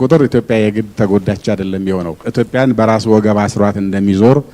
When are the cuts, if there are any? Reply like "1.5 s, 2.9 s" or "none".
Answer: 2.2 s